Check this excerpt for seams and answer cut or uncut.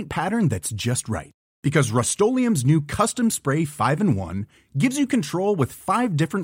uncut